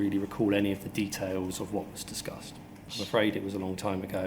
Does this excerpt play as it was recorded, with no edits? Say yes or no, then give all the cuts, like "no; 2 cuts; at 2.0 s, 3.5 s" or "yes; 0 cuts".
no; 1 cut; at 2.9 s